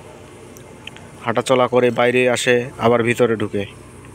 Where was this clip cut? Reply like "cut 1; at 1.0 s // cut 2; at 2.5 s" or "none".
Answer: none

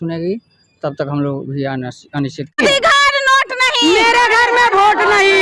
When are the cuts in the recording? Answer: cut 1; at 2.6 s

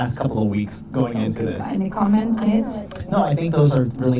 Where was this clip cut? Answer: cut 1; at 1.5 s

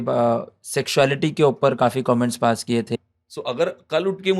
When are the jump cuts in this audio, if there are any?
cut 1; at 2.9 s

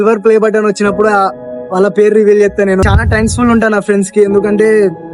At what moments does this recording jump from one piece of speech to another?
cut 1; at 2.8 s

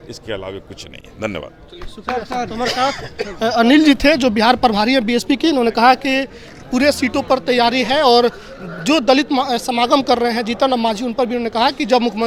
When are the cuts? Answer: none

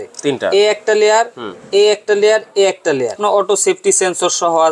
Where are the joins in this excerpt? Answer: cut 1; at 3.2 s

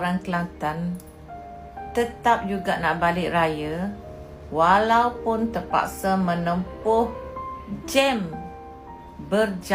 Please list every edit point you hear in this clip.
none

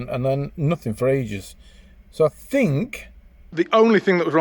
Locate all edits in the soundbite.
cut 1; at 3.4 s

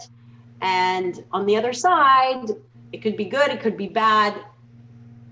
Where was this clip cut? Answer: none

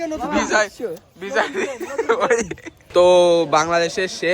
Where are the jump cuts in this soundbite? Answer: cut 1; at 2.8 s

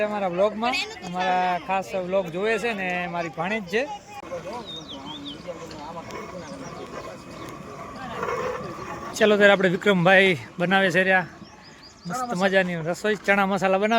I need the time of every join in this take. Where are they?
cut 1; at 4.3 s // cut 2; at 9.1 s

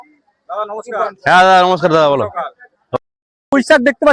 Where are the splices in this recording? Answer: cut 1; at 3.0 s

